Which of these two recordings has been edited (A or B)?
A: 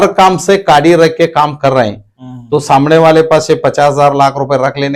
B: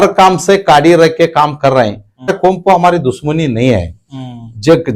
B